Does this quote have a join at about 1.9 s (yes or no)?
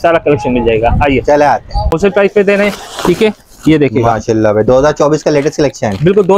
yes